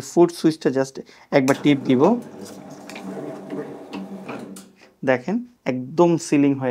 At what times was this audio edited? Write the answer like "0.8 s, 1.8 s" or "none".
5.5 s